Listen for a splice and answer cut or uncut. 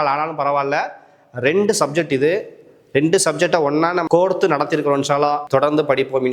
cut